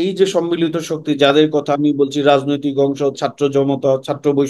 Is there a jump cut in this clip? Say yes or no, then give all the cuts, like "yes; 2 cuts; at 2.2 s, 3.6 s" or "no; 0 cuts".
no; 0 cuts